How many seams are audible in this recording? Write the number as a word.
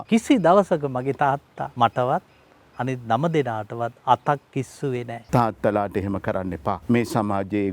three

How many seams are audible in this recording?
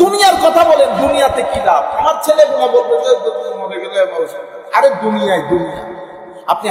zero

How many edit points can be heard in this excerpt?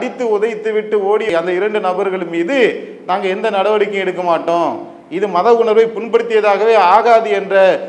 zero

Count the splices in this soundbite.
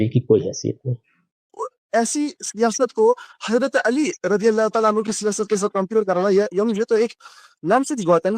one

